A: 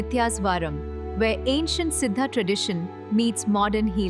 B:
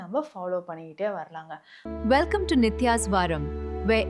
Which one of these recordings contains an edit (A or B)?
B